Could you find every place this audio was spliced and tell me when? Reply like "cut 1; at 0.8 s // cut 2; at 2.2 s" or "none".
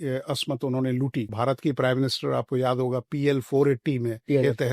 cut 1; at 1.3 s